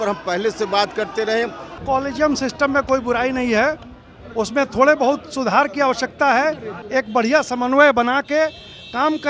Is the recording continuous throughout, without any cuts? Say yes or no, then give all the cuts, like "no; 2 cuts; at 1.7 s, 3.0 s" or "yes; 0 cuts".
no; 2 cuts; at 1.7 s, 6.8 s